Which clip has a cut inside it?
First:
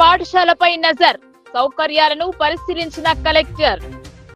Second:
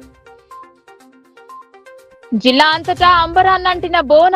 second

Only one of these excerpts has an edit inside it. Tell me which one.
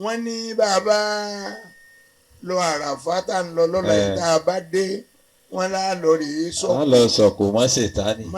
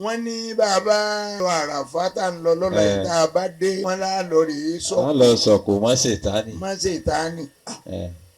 second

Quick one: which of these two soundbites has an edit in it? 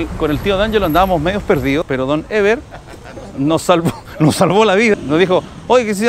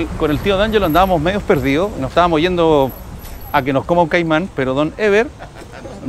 first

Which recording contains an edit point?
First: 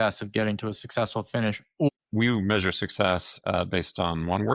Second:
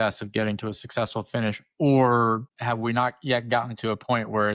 first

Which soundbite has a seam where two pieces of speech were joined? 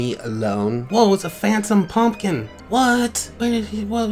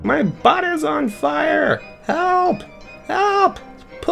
first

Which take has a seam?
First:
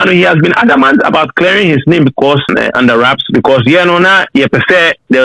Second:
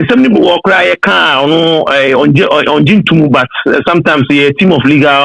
first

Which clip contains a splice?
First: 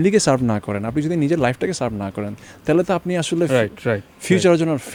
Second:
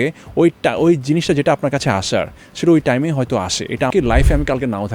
second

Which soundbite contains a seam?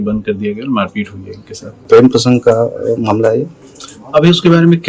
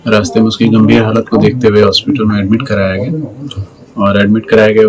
first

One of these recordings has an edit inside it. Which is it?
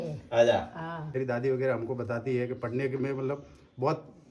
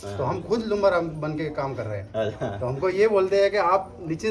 first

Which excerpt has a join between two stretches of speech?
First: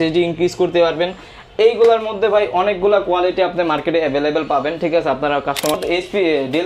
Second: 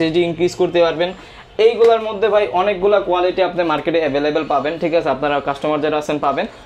first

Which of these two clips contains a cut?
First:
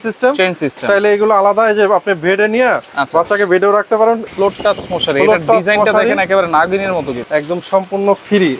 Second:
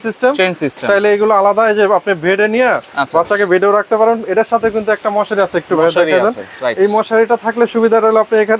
first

